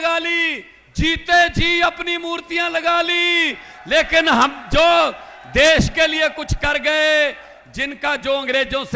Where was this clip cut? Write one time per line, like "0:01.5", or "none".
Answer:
none